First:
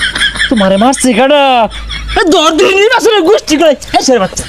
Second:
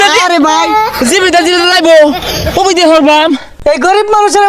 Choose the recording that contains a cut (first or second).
second